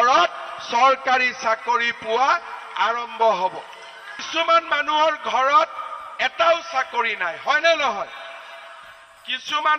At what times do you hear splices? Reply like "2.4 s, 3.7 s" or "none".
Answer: 4.1 s